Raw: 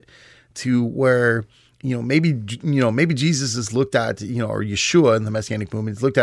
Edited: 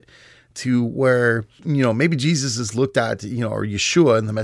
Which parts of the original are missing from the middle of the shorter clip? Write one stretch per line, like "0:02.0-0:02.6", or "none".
0:01.5-0:02.5